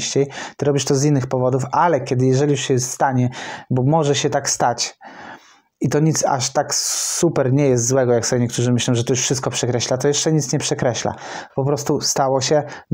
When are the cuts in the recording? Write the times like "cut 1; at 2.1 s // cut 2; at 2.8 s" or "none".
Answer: none